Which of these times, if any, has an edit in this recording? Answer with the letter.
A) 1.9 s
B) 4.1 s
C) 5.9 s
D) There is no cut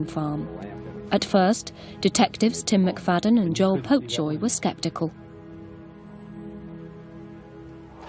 C